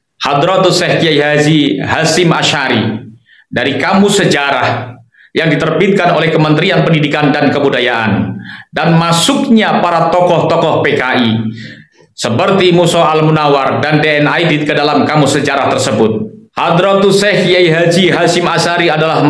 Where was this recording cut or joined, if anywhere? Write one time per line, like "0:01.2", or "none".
0:16.4